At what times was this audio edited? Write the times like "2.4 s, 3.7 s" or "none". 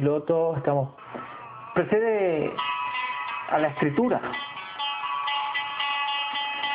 none

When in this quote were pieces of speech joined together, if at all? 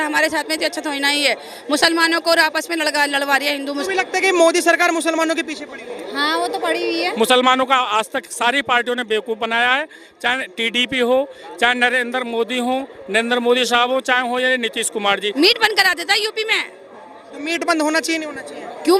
3.8 s, 7.1 s, 15.3 s

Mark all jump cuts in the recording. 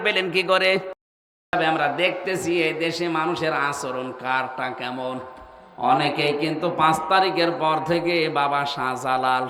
1.5 s

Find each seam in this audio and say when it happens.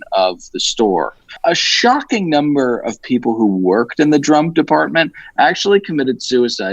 1.3 s

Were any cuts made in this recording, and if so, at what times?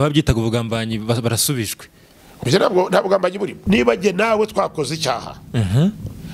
3.6 s

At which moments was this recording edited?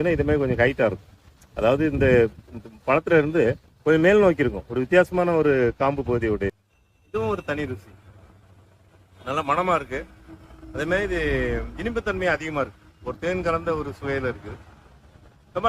6.5 s

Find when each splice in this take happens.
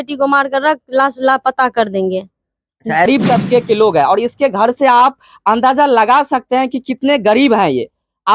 3.1 s

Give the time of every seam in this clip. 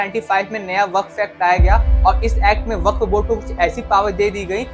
none

